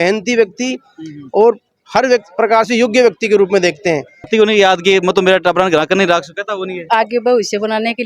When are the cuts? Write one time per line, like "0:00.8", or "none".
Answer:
0:04.3